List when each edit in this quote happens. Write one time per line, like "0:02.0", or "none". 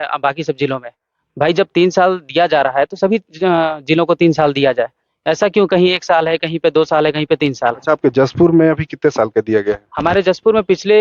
none